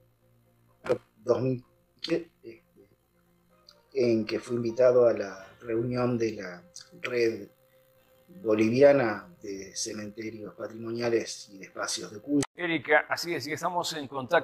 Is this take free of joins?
no; 1 cut; at 12.5 s

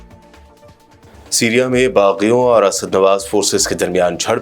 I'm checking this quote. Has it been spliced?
yes; 1 cut; at 1.1 s

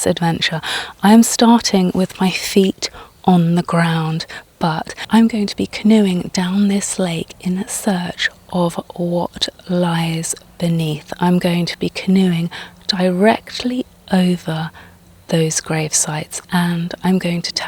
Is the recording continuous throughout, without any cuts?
yes; 0 cuts

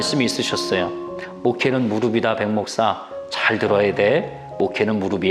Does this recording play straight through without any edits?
yes; 0 cuts

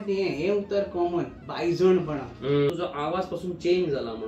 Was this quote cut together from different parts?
yes; 1 cut; at 2.7 s

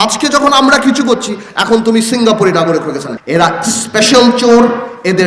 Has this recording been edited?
yes; 1 cut; at 3.1 s

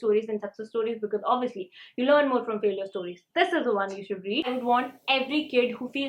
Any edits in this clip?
yes; 1 cut; at 4.5 s

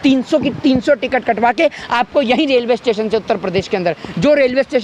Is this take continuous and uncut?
yes; 0 cuts

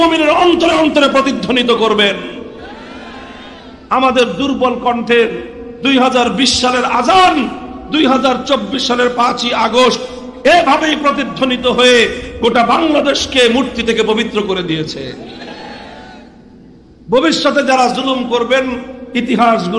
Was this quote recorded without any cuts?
yes; 0 cuts

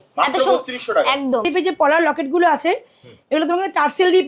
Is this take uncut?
no; 1 cut; at 1.5 s

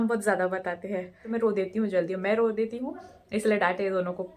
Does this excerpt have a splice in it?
yes; 1 cut; at 1.2 s

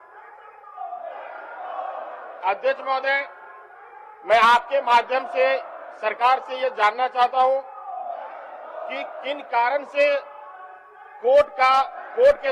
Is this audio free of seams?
yes; 0 cuts

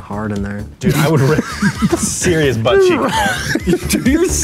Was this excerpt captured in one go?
yes; 0 cuts

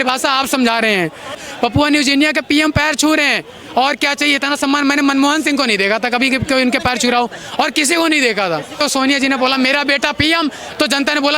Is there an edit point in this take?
yes; 2 cuts; at 1.4 s, 8.8 s

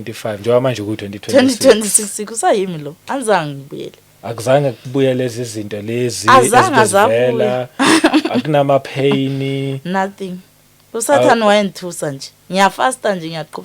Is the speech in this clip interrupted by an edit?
no; 0 cuts

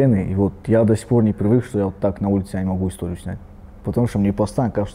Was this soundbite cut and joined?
no; 0 cuts

